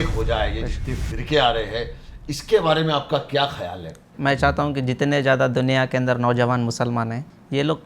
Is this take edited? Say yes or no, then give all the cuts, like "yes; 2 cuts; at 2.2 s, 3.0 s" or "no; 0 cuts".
yes; 1 cut; at 4.1 s